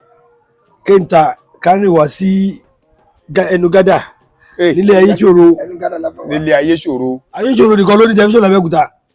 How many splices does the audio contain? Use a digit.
1